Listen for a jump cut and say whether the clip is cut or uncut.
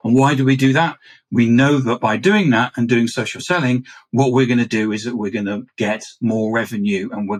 uncut